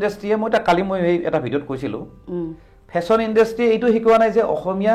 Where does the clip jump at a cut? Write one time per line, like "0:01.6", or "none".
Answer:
none